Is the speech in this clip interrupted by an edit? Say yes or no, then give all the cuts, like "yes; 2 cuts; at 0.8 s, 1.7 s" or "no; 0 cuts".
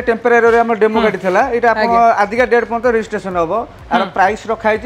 no; 0 cuts